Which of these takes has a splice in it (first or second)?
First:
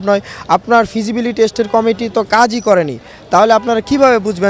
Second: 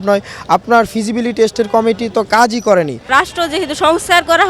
second